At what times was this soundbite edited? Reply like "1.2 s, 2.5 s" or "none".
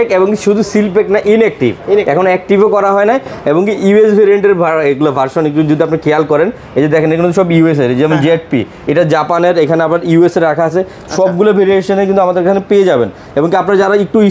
none

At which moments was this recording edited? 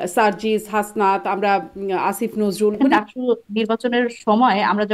2.8 s

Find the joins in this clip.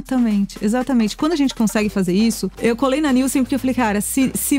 2.5 s

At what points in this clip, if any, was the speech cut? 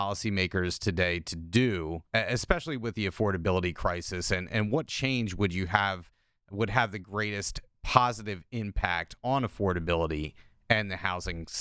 2.0 s

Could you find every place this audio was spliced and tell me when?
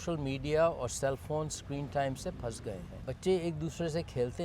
2.9 s

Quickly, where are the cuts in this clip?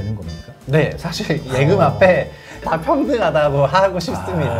2.7 s

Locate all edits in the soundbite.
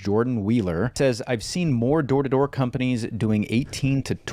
0.9 s

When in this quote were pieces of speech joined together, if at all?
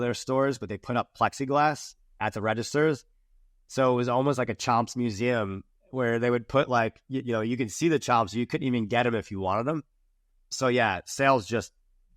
10.5 s

